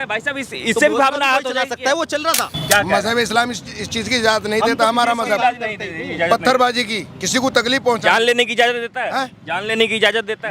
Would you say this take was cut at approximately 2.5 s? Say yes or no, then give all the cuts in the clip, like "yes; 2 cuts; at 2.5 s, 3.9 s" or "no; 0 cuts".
yes; 1 cut; at 2.5 s